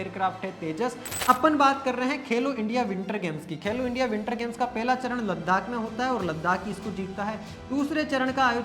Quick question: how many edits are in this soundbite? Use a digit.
1